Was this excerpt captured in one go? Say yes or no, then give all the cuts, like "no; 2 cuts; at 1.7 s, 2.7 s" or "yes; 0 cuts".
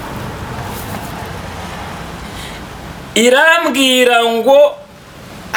yes; 0 cuts